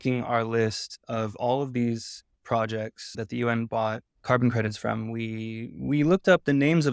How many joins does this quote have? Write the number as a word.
two